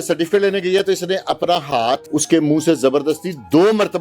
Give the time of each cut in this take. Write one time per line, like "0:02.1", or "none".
0:02.0